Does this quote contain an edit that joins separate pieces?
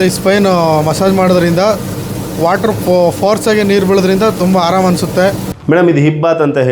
yes; 1 cut; at 5.5 s

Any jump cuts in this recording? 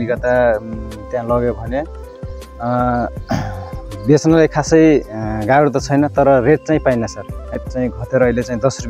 yes; 1 cut; at 7.5 s

